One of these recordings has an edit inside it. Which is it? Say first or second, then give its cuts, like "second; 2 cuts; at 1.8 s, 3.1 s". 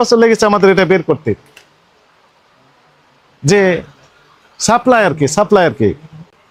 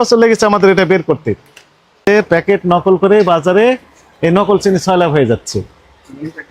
second; 1 cut; at 2.1 s